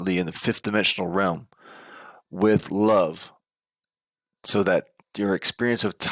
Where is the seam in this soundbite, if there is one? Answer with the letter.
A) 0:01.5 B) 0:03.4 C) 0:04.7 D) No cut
D